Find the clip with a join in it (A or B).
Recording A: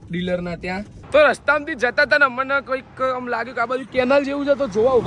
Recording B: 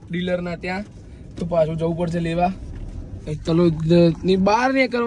A